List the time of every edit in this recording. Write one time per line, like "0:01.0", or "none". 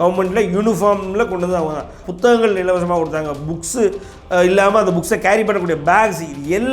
0:02.0